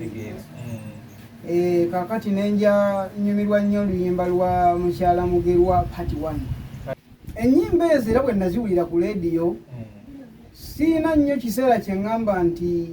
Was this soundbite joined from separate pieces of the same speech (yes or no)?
yes